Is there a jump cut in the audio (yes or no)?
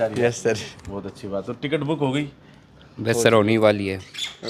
no